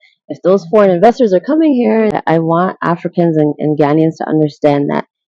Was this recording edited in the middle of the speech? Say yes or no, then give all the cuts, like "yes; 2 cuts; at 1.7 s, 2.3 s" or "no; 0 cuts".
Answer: yes; 1 cut; at 2.1 s